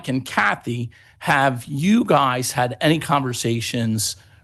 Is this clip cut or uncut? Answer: uncut